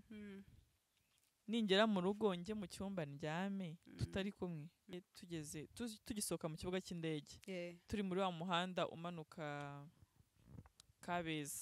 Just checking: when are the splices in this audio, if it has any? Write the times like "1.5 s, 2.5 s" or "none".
4.9 s